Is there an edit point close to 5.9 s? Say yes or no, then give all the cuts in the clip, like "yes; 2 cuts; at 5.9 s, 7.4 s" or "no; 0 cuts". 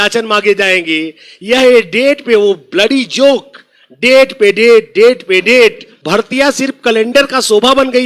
yes; 1 cut; at 5.9 s